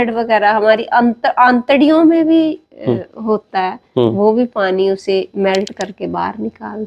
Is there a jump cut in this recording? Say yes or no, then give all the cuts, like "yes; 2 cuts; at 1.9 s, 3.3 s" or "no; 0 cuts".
no; 0 cuts